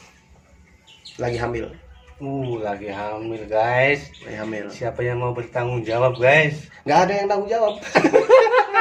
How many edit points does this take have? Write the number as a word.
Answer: zero